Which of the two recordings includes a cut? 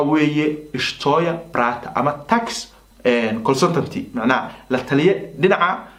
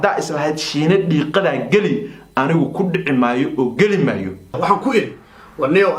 second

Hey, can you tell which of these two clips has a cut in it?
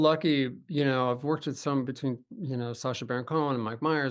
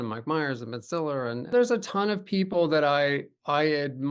second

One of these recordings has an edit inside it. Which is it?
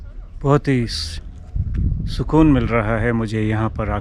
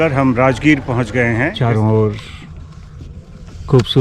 second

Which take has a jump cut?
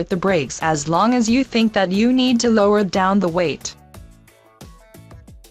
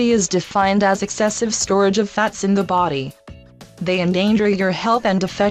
second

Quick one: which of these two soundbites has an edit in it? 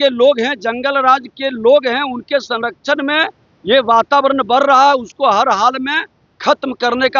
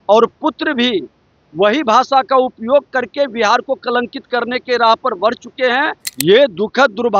second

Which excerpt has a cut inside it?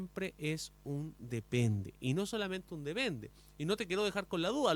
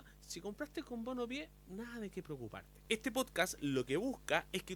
second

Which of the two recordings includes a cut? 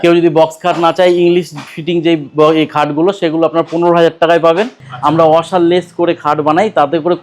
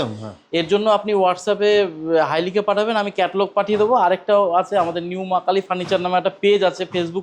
first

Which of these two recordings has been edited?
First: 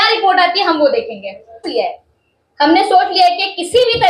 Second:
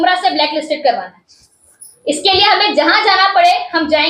first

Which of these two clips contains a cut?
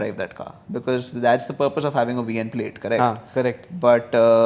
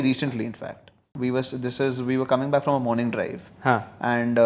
second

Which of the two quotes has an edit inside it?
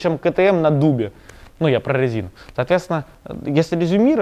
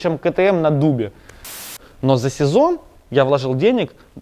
second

